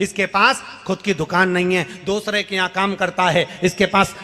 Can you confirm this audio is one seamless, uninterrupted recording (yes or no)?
no